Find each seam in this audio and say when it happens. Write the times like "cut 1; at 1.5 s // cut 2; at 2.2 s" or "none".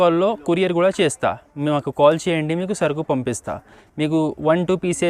cut 1; at 3.8 s